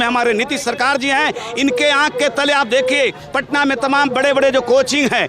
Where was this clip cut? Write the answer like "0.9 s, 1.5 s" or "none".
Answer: none